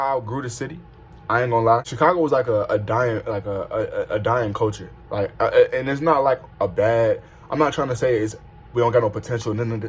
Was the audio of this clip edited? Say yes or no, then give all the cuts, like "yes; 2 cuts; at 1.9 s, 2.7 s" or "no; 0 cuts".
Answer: yes; 1 cut; at 1.9 s